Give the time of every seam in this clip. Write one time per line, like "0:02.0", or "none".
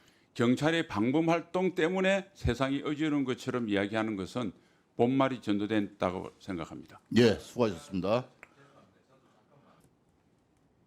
0:09.8